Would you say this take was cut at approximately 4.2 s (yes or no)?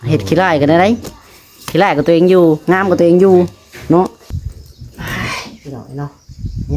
yes